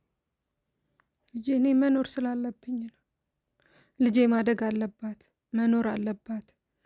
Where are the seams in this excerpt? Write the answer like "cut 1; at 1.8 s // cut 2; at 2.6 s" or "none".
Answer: none